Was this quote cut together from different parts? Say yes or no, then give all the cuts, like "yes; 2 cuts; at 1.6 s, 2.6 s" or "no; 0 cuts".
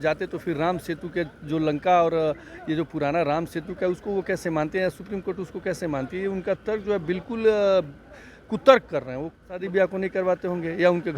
yes; 1 cut; at 9.6 s